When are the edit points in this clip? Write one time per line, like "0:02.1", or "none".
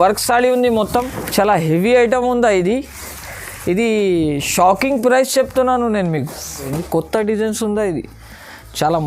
0:01.2
0:06.8

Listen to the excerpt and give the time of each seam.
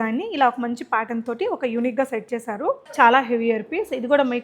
0:02.9

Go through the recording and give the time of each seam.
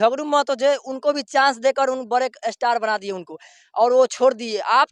none

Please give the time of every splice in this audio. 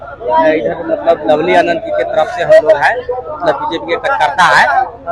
none

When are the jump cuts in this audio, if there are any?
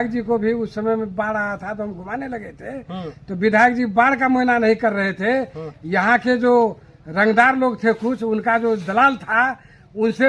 none

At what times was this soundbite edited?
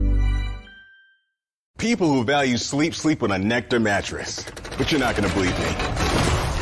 0:01.6

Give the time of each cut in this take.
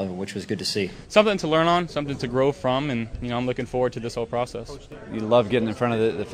0:01.0
0:05.0

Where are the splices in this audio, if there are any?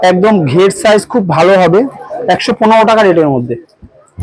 0:01.7

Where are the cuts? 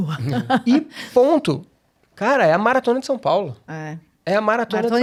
none

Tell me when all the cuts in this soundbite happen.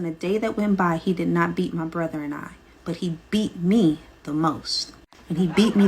0:02.7
0:04.9

